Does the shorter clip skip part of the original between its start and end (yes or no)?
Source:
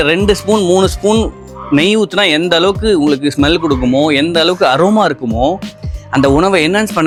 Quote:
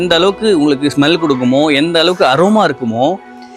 no